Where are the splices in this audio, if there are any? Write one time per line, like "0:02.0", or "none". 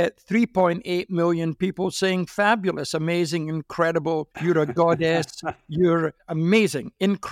0:06.2

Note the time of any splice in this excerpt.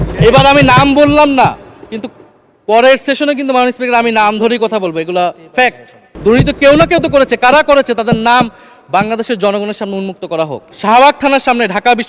0:06.1
0:10.6

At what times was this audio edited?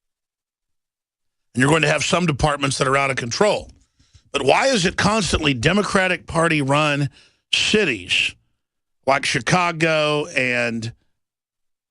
0:10.1

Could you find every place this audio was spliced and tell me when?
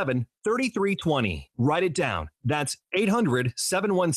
0:03.0

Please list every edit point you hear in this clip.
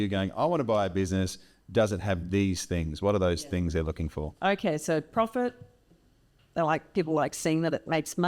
none

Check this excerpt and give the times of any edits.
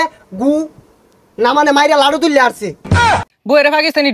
0:03.0

